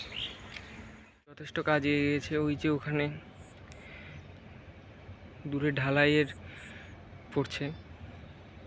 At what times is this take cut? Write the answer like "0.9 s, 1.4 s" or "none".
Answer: 1.5 s